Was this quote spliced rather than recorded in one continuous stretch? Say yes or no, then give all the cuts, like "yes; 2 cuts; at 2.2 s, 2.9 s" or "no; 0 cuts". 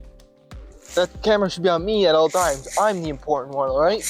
yes; 1 cut; at 0.9 s